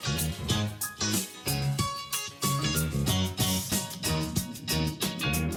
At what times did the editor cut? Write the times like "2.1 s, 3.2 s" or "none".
none